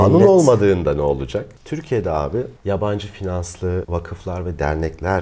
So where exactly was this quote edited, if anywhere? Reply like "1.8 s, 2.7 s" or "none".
1.6 s, 3.9 s